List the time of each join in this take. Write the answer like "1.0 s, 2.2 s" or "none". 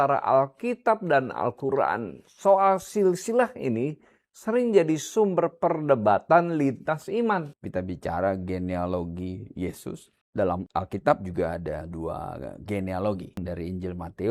7.6 s, 10.1 s, 11.9 s, 13.4 s